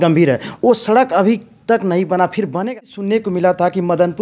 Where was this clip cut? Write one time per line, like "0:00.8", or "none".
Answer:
0:02.6

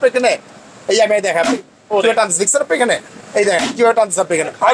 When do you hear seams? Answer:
none

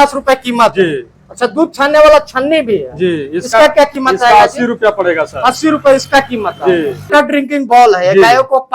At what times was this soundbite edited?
0:07.1

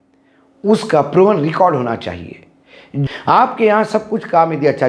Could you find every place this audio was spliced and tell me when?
0:03.1

